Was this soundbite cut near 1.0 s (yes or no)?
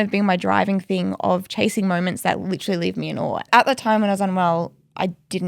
no